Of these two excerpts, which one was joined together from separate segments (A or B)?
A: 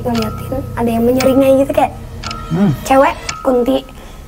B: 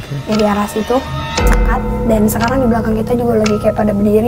B